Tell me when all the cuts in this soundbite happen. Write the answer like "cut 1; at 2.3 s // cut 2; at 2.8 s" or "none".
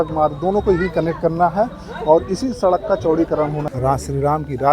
cut 1; at 3.6 s